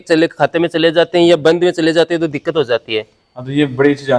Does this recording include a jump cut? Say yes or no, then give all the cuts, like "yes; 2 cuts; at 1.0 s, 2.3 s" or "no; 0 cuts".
no; 0 cuts